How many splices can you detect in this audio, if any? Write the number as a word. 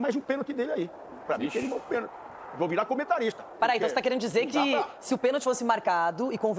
zero